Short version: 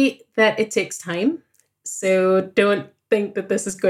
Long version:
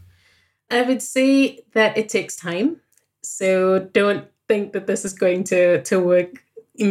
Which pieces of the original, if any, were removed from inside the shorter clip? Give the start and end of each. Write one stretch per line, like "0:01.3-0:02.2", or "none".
none